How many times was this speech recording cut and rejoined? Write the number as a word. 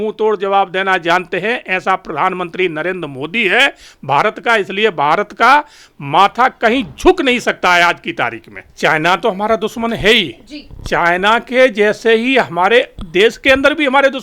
one